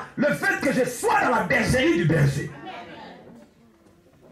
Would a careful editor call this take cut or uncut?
uncut